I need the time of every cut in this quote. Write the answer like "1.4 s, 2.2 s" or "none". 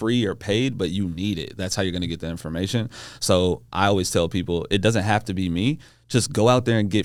none